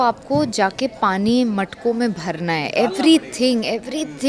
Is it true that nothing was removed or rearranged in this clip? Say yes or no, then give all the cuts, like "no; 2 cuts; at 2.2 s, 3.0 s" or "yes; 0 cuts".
yes; 0 cuts